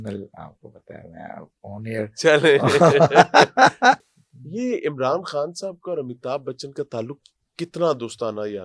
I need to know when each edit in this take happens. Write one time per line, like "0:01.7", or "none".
0:04.1